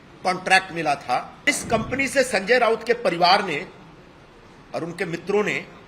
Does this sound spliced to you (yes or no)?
yes